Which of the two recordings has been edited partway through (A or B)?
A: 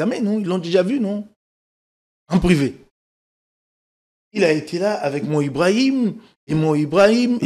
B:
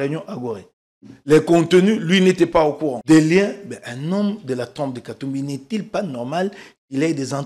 B